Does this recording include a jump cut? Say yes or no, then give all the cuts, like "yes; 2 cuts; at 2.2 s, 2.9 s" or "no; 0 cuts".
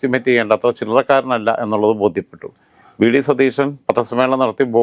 no; 0 cuts